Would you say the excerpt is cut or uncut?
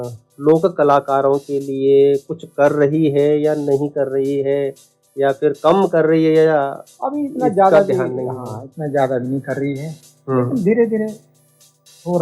uncut